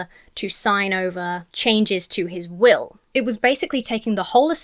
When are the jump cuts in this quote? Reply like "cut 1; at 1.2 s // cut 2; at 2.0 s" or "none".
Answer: cut 1; at 1.5 s // cut 2; at 3.0 s

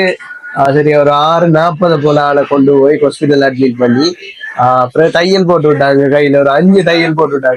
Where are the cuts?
none

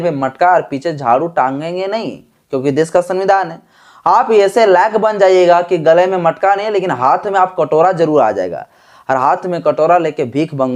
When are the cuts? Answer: none

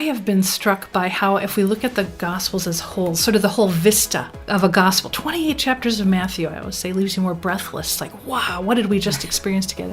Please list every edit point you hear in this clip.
cut 1; at 8.0 s

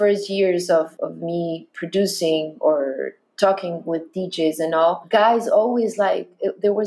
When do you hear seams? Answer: cut 1; at 0.9 s // cut 2; at 5.0 s

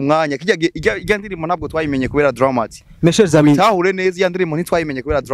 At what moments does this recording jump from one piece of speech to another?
none

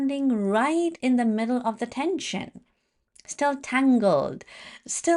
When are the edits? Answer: none

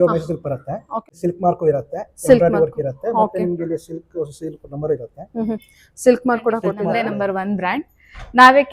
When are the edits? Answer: cut 1; at 1.1 s // cut 2; at 6.9 s

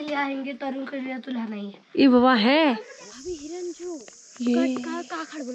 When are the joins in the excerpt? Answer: cut 1; at 2.9 s

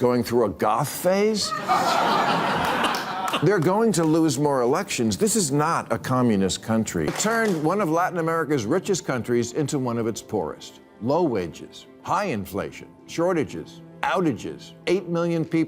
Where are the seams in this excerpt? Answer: cut 1; at 7.1 s

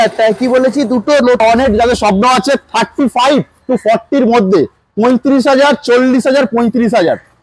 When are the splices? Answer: cut 1; at 1.4 s

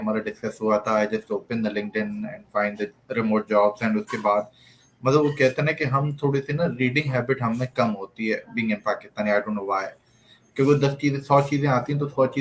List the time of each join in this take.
none

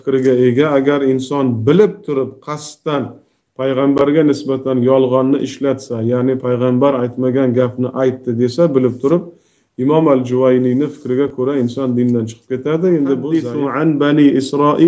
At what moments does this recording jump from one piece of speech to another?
cut 1; at 13.6 s

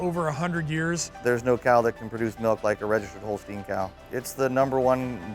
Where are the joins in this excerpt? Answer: cut 1; at 1.1 s // cut 2; at 4.0 s

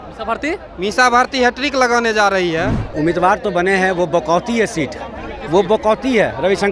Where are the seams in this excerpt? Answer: cut 1; at 2.8 s

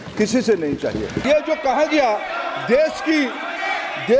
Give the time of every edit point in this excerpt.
cut 1; at 1.2 s

